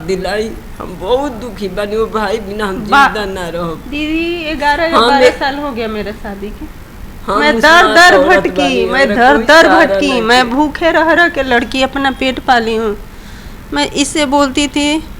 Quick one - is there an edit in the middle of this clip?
no; 0 cuts

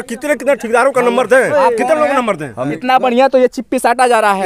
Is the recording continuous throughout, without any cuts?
no; 1 cut; at 2.7 s

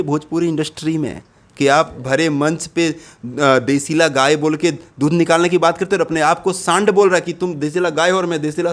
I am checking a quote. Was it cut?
no; 0 cuts

